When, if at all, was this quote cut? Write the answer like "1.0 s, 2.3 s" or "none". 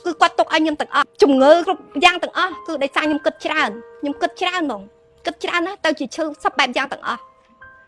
1.1 s, 1.6 s